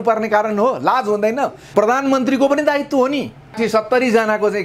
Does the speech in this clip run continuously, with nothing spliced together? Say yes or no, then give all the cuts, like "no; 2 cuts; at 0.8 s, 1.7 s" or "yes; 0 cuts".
no; 2 cuts; at 1.6 s, 3.6 s